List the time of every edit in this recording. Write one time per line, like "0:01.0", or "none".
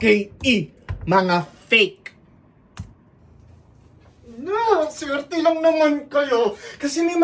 0:03.2